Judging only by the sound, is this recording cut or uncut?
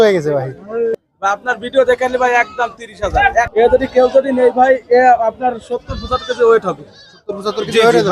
cut